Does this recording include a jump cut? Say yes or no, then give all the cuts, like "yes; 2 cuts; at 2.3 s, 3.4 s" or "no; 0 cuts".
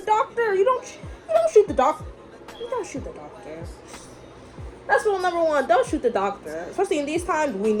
no; 0 cuts